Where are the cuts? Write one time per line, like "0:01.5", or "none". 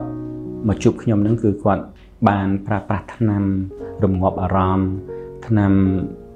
none